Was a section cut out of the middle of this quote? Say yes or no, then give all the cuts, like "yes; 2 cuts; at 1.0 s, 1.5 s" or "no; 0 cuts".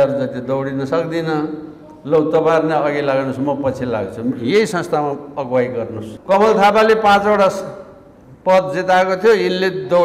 yes; 1 cut; at 6.1 s